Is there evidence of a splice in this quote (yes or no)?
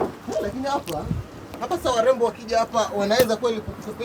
no